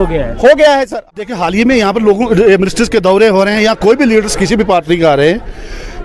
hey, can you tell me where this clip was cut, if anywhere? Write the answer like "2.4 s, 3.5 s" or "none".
1.2 s